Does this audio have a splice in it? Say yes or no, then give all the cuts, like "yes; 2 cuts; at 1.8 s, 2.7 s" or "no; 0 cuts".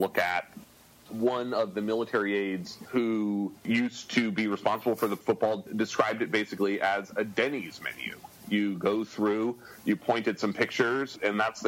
yes; 3 cuts; at 2.7 s, 3.6 s, 5.2 s